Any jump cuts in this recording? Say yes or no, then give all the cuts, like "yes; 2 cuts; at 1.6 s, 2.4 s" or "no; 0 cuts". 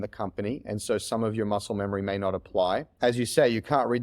yes; 1 cut; at 2.9 s